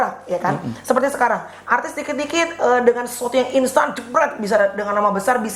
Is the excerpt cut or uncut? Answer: uncut